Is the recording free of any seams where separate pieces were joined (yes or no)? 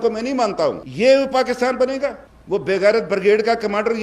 no